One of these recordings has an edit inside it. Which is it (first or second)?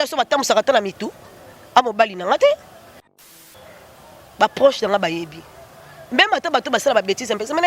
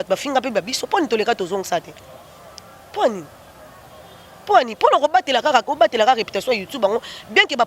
first